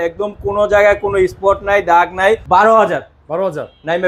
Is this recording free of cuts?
no; 1 cut; at 2.4 s

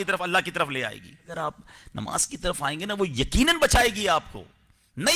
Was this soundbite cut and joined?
yes; 1 cut; at 1.3 s

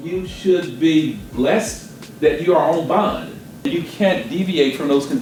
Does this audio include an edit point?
no; 0 cuts

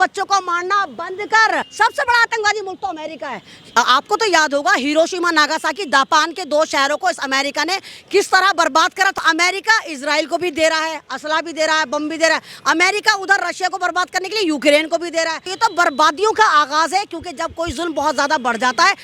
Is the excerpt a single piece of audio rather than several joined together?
no; 3 cuts; at 1.7 s, 9.2 s, 15.4 s

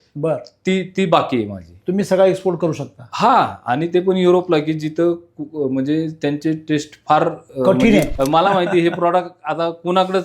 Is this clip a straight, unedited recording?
no; 1 cut; at 8.1 s

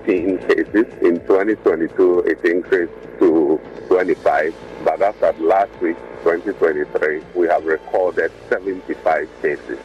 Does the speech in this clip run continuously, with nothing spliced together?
no; 5 cuts; at 0.9 s, 3.0 s, 3.7 s, 7.2 s, 8.4 s

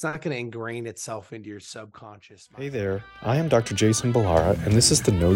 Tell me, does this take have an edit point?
yes; 1 cut; at 2.5 s

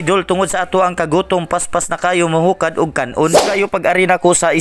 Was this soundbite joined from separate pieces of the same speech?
yes; 1 cut; at 3.5 s

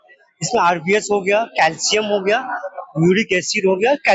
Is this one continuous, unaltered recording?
yes; 0 cuts

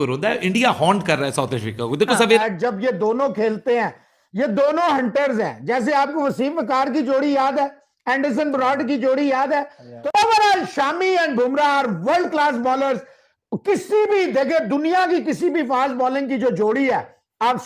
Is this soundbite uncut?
no; 2 cuts; at 2.4 s, 9.9 s

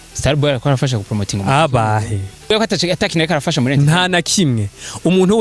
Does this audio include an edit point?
yes; 1 cut; at 2.5 s

